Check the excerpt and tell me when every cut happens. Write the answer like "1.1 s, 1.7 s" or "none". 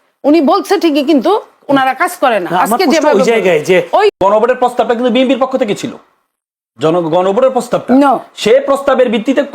4.2 s